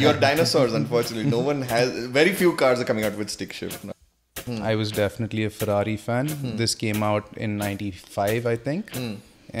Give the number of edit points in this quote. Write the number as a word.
one